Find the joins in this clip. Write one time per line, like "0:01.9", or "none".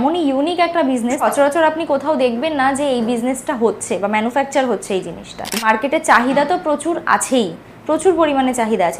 0:01.2
0:05.7

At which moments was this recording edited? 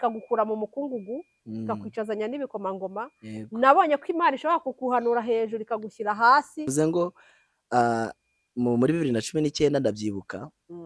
0:06.7

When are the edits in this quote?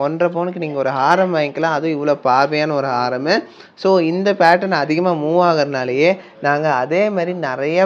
none

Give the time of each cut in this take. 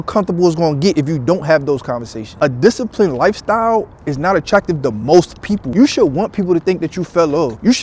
0:02.3
0:05.8

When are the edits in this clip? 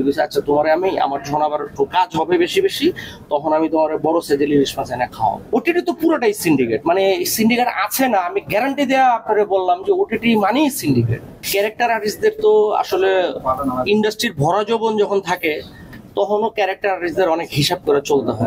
0:05.4
0:11.5

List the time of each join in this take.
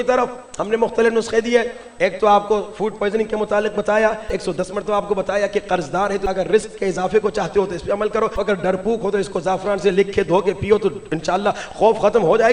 0:04.3
0:06.2
0:08.4

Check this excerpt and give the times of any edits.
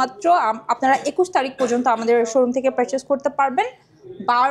none

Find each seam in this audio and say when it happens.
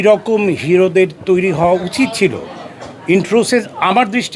none

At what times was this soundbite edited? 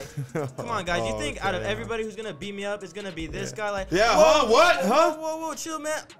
none

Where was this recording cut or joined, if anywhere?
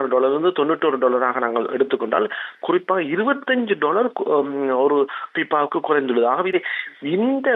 0:06.5

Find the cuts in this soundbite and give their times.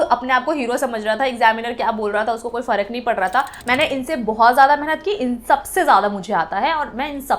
0:03.6

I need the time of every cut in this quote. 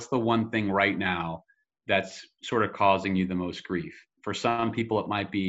none

